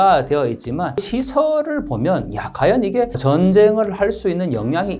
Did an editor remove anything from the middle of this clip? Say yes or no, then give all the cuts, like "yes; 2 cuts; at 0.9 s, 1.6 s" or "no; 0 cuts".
yes; 2 cuts; at 1.1 s, 3.2 s